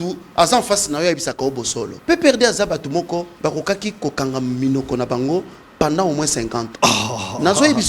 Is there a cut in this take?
yes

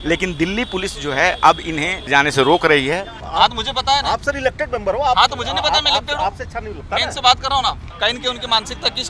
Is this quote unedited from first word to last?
no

